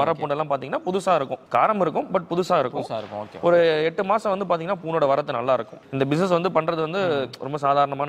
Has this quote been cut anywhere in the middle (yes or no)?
yes